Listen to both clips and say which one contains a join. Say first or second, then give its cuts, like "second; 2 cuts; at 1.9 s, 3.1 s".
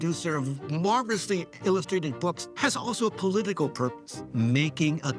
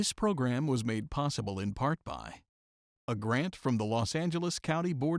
first; 2 cuts; at 2.4 s, 4.2 s